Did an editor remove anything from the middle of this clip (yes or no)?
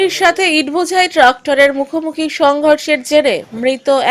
no